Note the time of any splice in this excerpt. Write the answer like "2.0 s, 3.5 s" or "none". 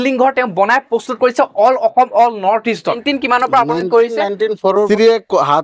3.0 s, 4.9 s